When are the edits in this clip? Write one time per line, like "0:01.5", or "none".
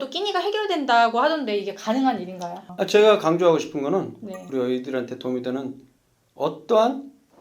0:02.7